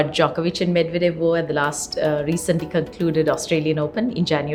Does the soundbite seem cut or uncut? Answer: uncut